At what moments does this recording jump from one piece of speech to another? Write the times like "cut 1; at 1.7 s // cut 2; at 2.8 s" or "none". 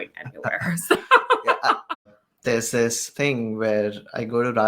cut 1; at 2.2 s // cut 2; at 3.0 s